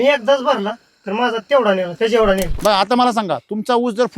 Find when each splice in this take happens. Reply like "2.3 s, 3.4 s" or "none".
2.5 s